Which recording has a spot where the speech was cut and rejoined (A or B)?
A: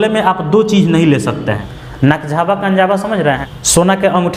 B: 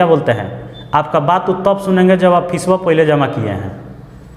A